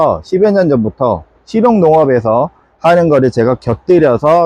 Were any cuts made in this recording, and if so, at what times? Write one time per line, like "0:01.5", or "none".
none